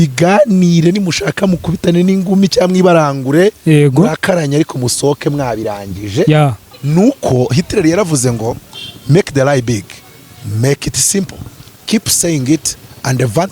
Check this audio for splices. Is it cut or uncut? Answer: cut